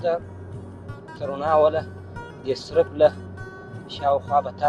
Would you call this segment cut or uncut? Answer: uncut